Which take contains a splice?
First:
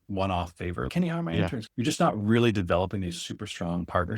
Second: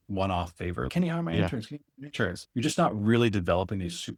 first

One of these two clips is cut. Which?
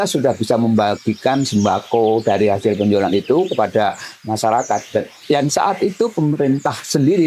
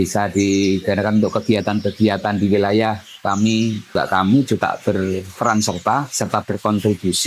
second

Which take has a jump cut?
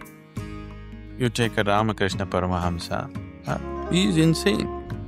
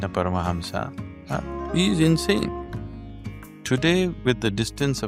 first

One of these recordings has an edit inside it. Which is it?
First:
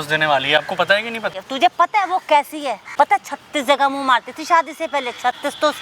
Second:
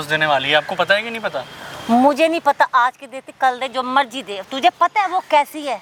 first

